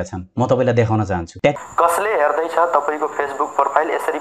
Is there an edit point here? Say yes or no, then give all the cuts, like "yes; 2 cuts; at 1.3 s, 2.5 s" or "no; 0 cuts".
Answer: yes; 1 cut; at 1.5 s